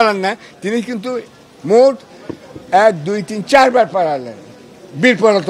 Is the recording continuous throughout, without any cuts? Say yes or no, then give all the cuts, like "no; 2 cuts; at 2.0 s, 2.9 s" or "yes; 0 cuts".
yes; 0 cuts